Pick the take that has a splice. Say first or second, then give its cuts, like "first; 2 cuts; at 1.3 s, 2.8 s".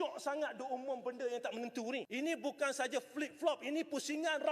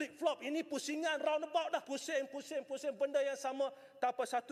first; 1 cut; at 2.1 s